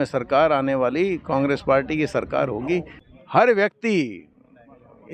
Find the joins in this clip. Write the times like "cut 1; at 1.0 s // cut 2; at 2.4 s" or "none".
cut 1; at 3.0 s